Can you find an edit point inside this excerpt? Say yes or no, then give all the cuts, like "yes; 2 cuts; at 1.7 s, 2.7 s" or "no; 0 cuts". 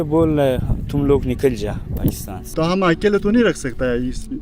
yes; 1 cut; at 2.5 s